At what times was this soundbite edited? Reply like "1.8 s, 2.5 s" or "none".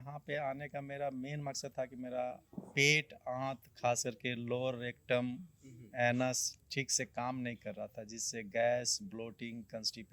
2.5 s